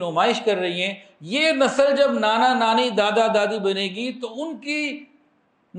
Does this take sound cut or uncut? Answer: uncut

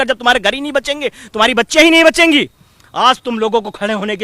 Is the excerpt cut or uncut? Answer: uncut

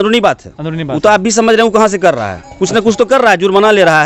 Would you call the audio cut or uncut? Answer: uncut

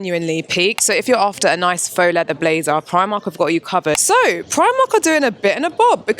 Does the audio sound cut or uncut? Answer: cut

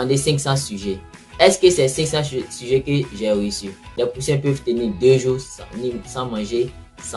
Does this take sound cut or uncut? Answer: cut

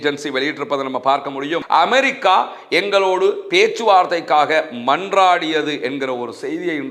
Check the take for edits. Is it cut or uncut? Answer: cut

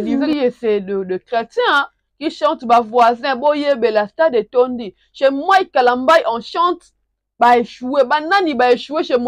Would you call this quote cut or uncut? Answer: uncut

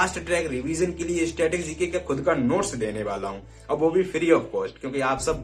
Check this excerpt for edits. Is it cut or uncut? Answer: uncut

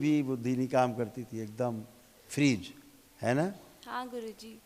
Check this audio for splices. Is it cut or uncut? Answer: uncut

